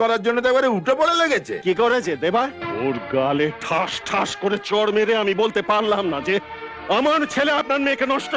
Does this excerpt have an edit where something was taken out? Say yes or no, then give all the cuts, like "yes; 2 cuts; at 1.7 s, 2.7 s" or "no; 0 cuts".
yes; 1 cut; at 2.6 s